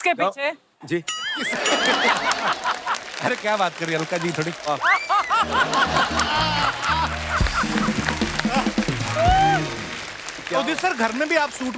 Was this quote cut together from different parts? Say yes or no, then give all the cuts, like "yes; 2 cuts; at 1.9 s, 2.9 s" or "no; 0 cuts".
no; 0 cuts